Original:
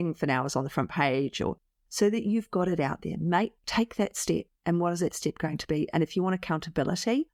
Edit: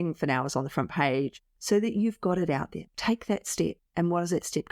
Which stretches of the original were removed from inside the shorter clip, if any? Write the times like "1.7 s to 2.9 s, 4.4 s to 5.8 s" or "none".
1.3 s to 1.6 s, 3.2 s to 3.5 s